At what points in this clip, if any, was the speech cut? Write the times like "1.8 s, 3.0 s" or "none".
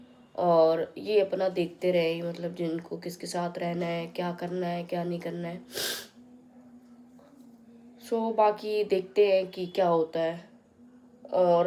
none